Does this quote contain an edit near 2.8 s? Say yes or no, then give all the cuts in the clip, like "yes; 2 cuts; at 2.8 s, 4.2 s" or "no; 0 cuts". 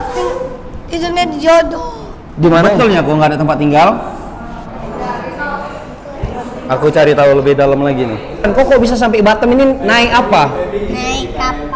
yes; 2 cuts; at 2.8 s, 8.5 s